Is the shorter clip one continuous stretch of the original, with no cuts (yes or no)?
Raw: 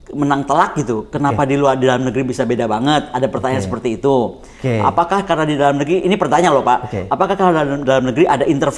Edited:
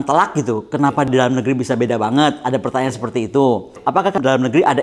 no